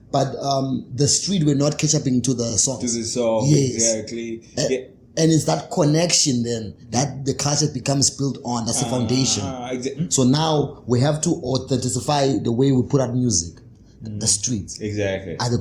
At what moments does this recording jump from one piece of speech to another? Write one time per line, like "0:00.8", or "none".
0:10.0